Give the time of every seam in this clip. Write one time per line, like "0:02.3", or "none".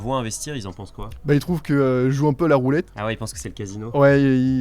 none